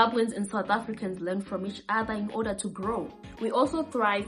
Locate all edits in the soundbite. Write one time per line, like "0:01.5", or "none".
0:03.2